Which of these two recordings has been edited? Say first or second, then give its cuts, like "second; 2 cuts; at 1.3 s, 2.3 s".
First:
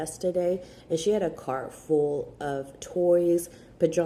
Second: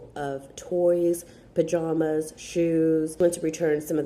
second; 1 cut; at 3.2 s